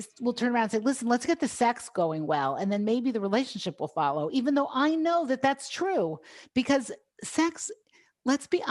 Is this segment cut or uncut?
uncut